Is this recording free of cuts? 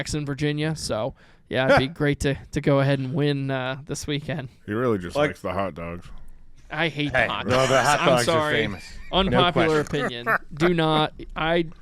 yes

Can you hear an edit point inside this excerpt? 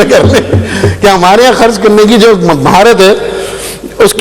no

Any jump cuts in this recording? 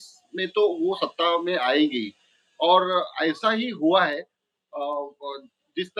no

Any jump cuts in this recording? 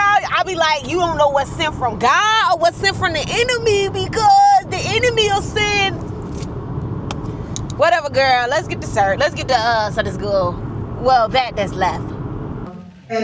no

